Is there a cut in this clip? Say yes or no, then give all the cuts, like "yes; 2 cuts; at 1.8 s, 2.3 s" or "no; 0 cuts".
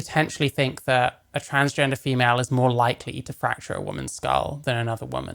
no; 0 cuts